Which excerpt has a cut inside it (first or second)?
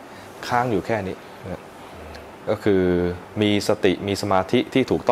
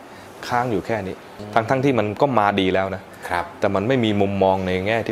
second